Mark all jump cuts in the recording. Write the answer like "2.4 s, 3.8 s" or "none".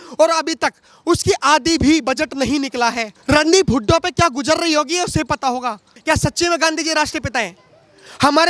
3.1 s, 5.9 s